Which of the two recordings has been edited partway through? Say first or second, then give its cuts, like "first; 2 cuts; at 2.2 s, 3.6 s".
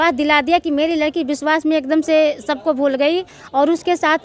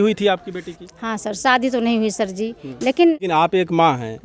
second; 1 cut; at 3.2 s